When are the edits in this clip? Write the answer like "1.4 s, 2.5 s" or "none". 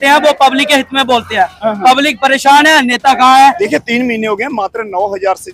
3.6 s